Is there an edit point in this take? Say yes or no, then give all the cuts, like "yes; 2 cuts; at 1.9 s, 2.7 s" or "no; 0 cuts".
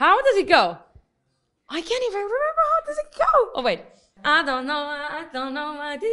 yes; 1 cut; at 4.1 s